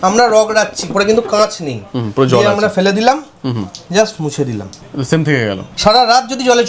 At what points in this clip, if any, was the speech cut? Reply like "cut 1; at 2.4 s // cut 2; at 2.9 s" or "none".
cut 1; at 0.9 s // cut 2; at 4.8 s // cut 3; at 5.7 s